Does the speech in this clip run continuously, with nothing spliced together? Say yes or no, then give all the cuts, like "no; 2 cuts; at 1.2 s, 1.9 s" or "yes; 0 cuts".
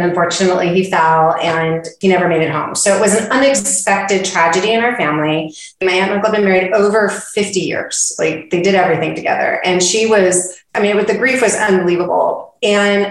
no; 2 cuts; at 5.8 s, 10.7 s